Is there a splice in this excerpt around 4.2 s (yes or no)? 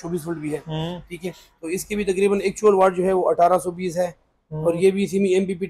no